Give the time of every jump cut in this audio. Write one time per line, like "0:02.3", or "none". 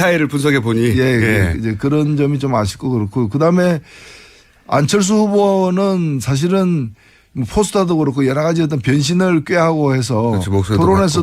0:01.7